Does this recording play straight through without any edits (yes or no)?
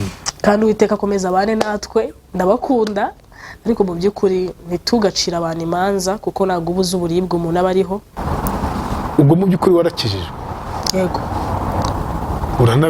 no